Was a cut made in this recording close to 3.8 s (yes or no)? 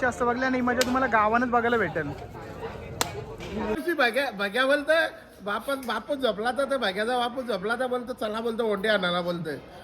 yes